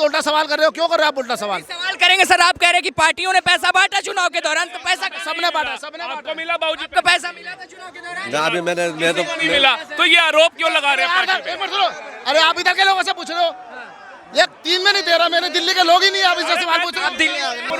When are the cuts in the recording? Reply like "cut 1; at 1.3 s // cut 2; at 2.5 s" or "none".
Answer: none